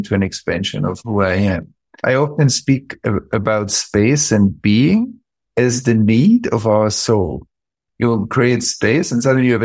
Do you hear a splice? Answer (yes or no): yes